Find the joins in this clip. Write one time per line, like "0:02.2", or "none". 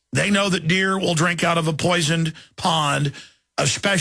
0:02.1